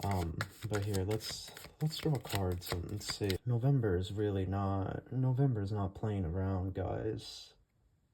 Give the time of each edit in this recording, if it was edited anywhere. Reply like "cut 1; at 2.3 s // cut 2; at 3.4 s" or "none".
cut 1; at 3.4 s